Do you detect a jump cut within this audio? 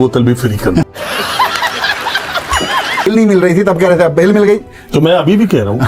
yes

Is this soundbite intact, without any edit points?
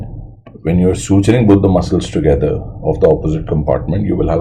yes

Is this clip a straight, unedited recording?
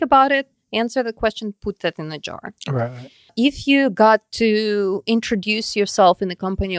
no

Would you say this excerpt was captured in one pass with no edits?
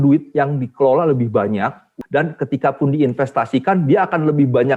no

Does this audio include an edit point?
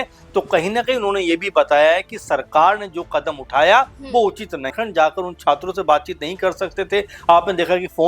yes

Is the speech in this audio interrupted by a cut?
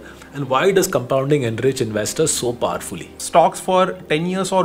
yes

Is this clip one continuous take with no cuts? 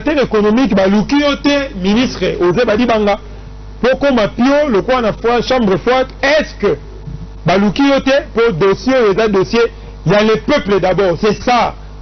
yes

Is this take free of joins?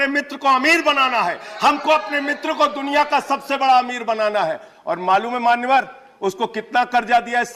yes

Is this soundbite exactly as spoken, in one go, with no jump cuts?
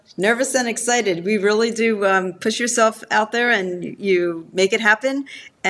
yes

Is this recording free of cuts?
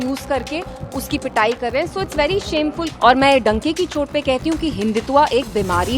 no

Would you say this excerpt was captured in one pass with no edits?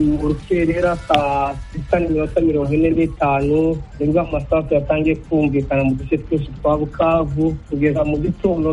no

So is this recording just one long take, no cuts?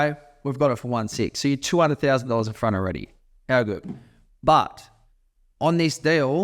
yes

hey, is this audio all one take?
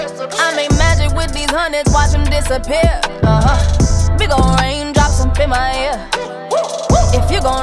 yes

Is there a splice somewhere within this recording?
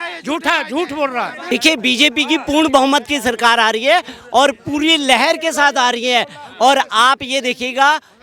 yes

